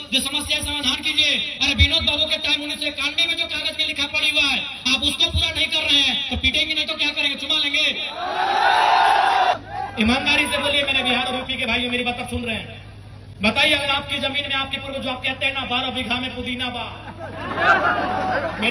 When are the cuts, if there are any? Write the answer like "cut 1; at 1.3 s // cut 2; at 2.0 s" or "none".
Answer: cut 1; at 9.5 s

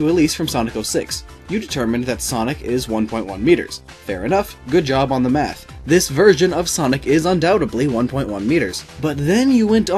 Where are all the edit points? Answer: none

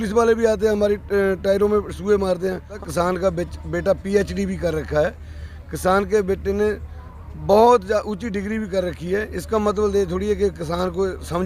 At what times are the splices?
cut 1; at 2.7 s

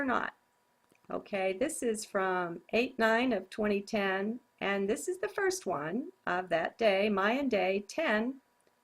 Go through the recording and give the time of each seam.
cut 1; at 4.5 s

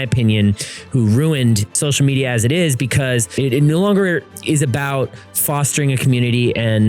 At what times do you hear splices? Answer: cut 1; at 1.8 s // cut 2; at 3.3 s

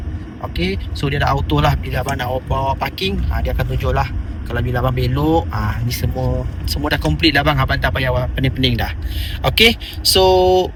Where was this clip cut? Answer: none

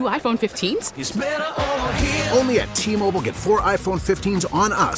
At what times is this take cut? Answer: none

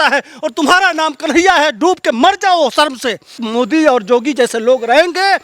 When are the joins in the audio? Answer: cut 1; at 3.4 s

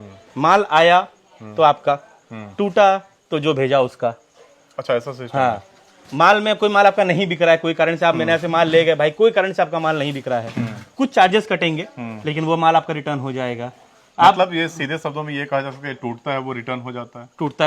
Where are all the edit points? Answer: none

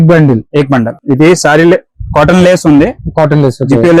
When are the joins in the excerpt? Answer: cut 1; at 1.0 s

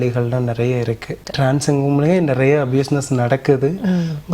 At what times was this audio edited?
cut 1; at 1.2 s

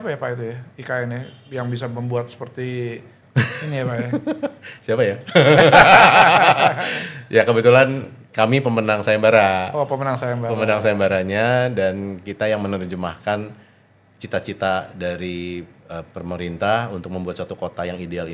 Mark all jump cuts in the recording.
cut 1; at 3.2 s

